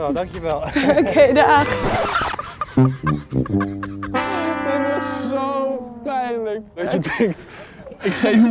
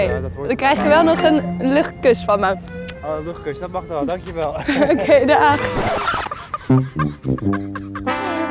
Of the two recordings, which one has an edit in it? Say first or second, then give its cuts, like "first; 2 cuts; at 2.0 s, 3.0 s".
first; 1 cut; at 6.8 s